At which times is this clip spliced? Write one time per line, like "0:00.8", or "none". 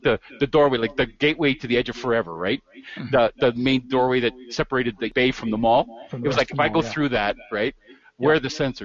0:05.1

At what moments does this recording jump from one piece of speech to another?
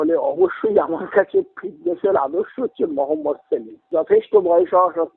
0:03.8

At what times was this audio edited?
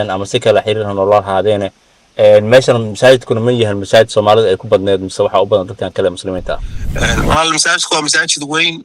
0:06.8

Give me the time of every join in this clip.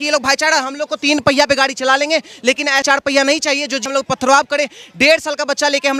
none

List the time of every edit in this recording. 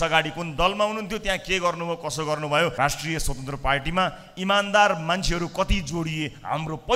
0:02.7

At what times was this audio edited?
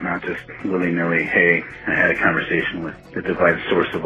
0:03.0

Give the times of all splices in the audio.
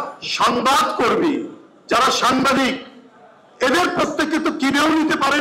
none

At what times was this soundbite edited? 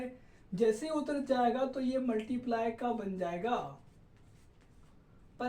none

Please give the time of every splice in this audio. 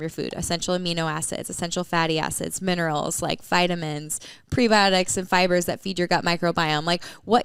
none

